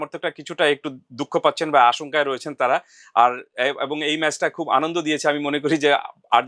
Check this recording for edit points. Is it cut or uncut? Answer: uncut